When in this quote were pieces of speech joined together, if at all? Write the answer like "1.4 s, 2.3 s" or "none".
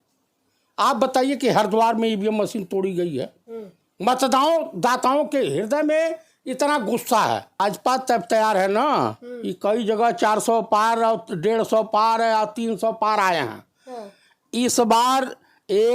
7.6 s